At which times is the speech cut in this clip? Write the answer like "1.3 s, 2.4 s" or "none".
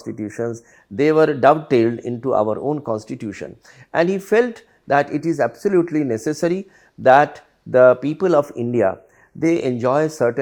none